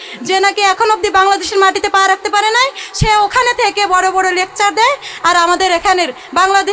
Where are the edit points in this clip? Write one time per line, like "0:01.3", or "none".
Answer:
none